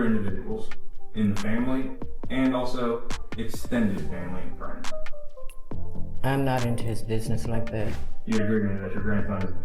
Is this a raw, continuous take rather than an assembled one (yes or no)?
no